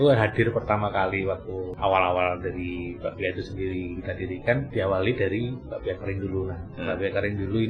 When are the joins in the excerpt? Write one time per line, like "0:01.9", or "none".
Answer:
0:01.7
0:04.7